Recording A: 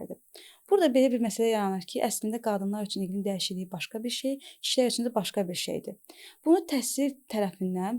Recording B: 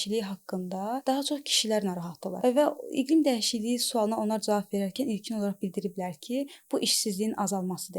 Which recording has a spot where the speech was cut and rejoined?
B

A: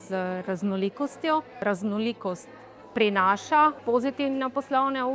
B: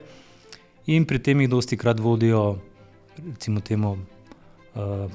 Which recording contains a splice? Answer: A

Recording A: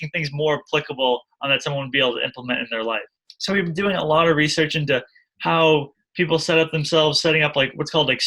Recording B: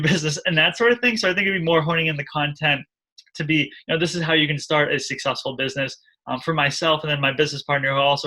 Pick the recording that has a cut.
A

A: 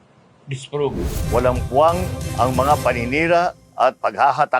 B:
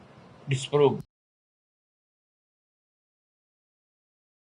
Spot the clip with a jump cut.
A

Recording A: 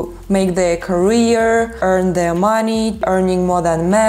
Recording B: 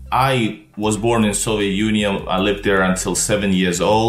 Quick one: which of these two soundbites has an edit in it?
A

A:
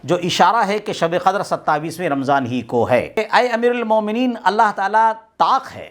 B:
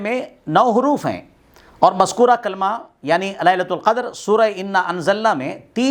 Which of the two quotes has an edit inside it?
A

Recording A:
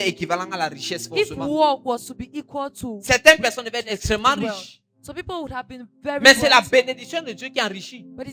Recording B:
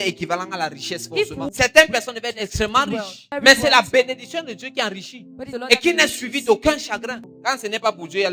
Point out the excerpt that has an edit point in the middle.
B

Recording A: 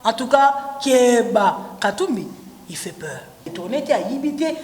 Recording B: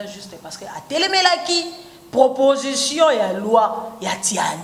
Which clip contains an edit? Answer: A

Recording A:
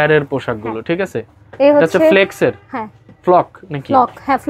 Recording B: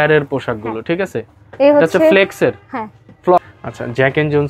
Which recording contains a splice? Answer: B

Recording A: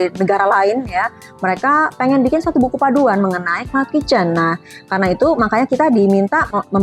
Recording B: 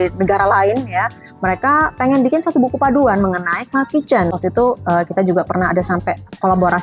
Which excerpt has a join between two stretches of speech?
B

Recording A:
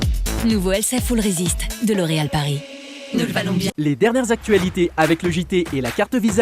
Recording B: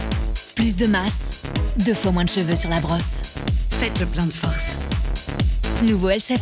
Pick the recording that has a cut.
A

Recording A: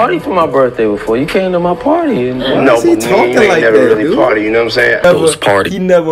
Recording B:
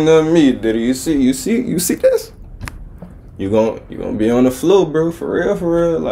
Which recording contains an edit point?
A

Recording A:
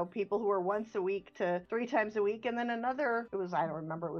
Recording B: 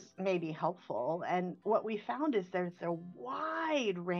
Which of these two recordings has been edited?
A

